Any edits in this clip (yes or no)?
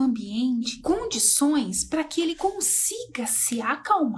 no